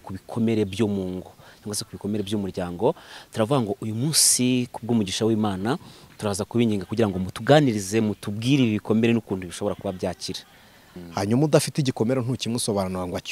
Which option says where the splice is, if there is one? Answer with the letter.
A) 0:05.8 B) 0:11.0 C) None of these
B